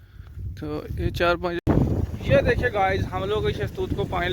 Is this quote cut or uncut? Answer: cut